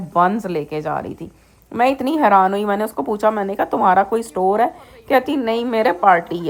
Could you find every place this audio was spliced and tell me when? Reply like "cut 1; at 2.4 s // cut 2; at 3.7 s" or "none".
none